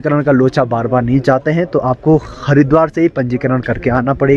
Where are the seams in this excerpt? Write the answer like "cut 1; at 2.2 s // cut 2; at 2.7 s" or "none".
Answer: none